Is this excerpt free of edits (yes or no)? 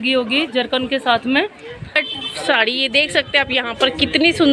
no